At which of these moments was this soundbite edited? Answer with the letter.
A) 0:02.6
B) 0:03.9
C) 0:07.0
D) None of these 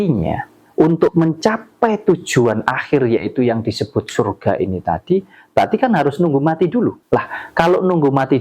C